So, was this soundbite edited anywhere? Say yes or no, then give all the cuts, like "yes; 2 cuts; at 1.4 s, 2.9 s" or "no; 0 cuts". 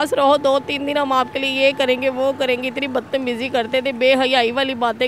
no; 0 cuts